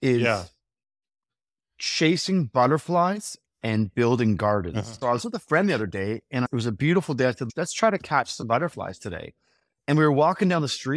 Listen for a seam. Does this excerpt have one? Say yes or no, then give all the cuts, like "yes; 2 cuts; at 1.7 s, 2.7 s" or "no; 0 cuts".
yes; 3 cuts; at 4.9 s, 6.5 s, 7.4 s